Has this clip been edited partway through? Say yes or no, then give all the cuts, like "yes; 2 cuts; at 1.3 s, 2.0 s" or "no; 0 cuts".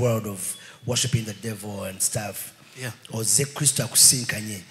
no; 0 cuts